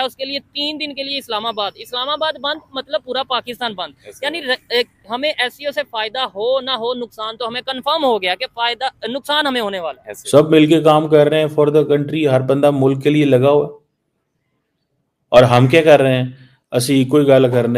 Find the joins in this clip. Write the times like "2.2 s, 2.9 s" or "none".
10.2 s